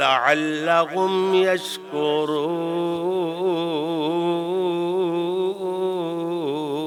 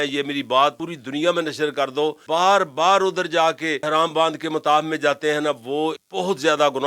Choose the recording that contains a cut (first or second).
second